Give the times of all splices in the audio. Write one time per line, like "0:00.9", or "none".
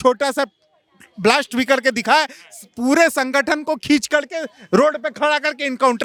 none